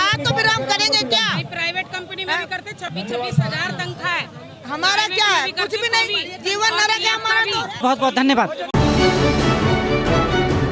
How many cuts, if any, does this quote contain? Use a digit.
0